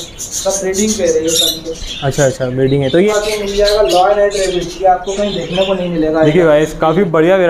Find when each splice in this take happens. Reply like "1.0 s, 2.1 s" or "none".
3.1 s